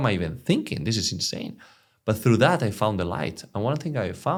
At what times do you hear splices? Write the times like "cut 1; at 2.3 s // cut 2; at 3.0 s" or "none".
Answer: none